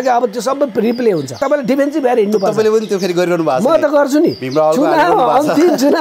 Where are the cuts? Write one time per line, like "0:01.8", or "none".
0:01.4